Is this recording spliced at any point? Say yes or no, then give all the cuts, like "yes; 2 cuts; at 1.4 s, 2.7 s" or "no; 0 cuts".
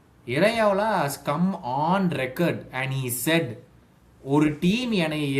no; 0 cuts